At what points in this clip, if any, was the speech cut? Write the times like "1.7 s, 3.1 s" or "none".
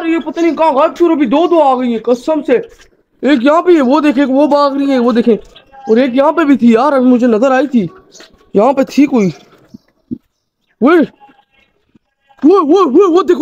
none